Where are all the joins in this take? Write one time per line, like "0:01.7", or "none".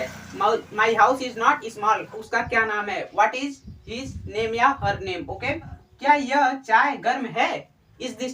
0:02.2
0:05.8